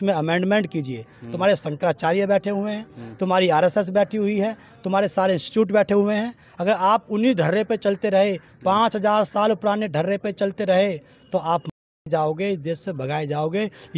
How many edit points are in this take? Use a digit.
0